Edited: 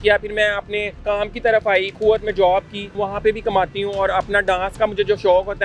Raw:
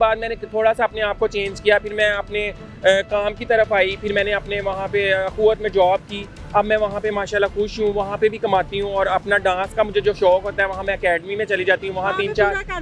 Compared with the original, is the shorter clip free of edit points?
no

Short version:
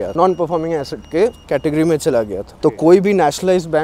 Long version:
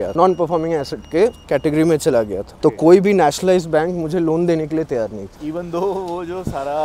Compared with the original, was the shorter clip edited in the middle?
no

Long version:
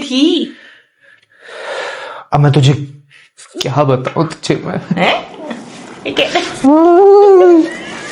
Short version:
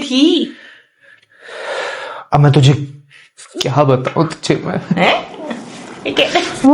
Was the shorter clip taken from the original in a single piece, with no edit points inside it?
yes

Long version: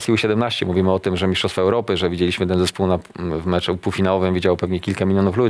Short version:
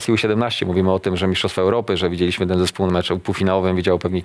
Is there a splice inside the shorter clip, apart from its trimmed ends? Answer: yes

